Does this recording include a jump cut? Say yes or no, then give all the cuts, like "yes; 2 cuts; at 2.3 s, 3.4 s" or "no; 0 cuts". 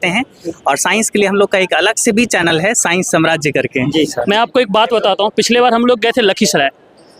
yes; 1 cut; at 4.2 s